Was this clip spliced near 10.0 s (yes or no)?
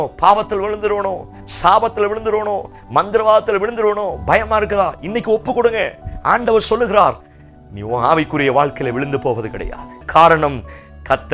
yes